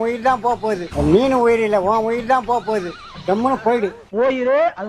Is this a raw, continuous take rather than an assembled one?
no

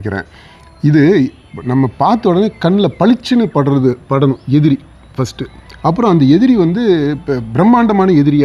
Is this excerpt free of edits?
yes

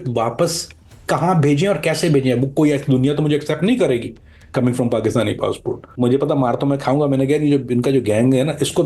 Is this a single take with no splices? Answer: no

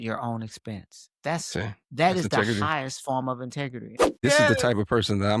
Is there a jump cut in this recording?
yes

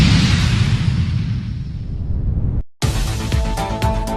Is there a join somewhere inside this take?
yes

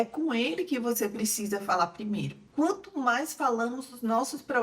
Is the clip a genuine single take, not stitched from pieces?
no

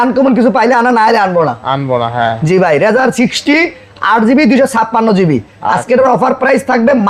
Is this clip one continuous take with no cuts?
yes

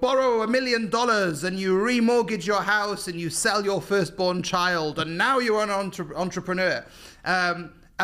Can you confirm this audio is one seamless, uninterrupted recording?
yes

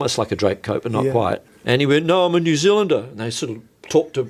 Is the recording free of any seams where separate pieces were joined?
no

